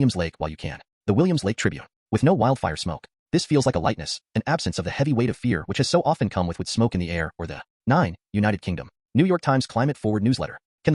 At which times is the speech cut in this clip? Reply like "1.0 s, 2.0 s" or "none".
none